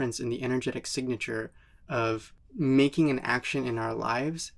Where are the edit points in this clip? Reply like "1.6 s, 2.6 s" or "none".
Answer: 2.4 s